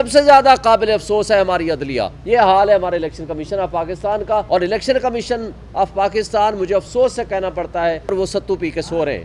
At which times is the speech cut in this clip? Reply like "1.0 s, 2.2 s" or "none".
2.1 s, 4.5 s, 8.1 s